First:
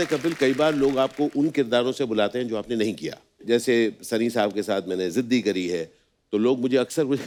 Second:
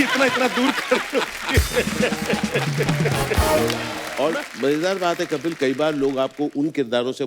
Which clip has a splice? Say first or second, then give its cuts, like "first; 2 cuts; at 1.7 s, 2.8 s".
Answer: second; 1 cut; at 4.0 s